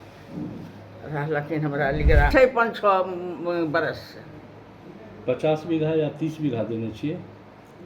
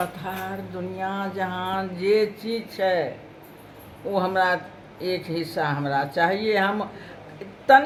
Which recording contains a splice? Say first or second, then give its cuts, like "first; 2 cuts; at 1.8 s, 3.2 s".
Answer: first; 1 cut; at 2.3 s